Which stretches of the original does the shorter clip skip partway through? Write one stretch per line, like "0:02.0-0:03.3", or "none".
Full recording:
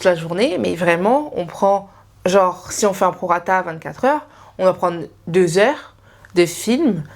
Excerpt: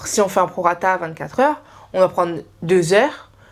none

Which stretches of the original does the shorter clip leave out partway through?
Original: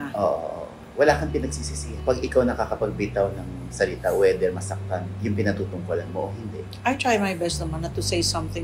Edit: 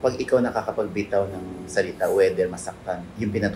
none

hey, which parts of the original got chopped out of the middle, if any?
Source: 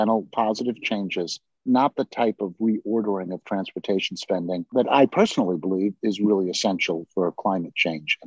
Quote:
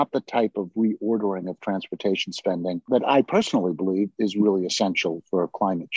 none

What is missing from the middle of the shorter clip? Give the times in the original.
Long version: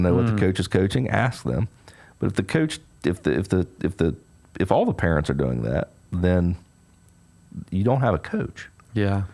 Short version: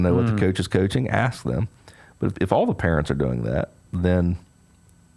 0:02.3-0:04.5

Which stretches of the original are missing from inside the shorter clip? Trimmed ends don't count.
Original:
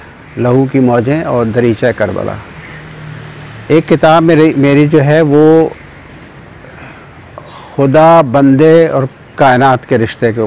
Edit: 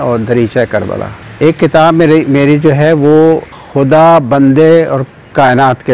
0:02.5-0:03.5
0:05.9-0:07.6

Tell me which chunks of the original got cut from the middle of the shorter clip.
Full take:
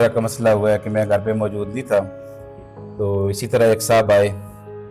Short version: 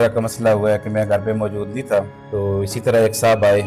0:02.2-0:02.8

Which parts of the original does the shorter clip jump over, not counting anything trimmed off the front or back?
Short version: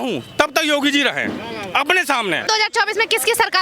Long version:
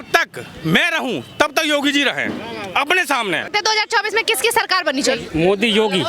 0:03.5-0:03.6

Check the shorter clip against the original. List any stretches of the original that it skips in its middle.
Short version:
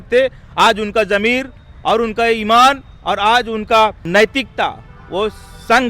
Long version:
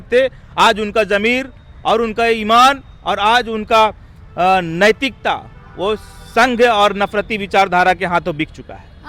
0:04.0-0:04.7

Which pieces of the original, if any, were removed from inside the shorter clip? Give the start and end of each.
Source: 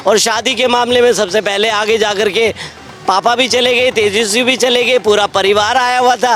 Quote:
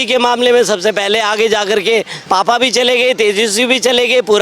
0:02.6-0:02.9

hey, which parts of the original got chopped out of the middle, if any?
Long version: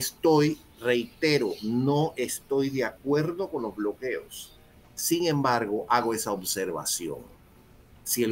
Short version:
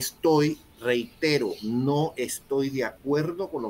none

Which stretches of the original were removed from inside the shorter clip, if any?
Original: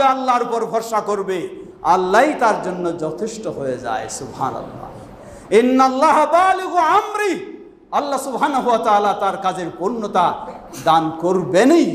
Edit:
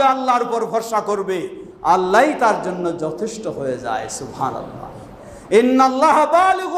none

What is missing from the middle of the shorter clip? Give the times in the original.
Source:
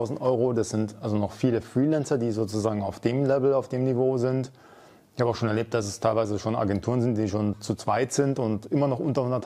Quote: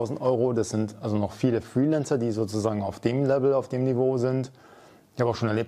none

